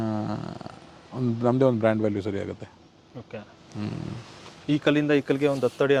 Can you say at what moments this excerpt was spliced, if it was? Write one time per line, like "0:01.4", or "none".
none